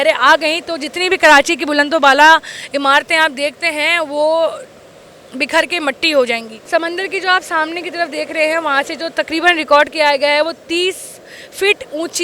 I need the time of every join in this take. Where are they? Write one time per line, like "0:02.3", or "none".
none